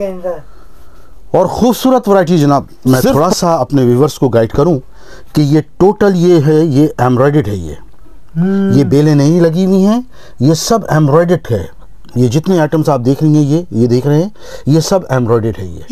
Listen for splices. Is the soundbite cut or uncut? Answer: cut